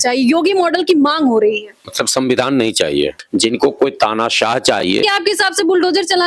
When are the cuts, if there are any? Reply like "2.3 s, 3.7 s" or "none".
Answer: 3.2 s, 5.0 s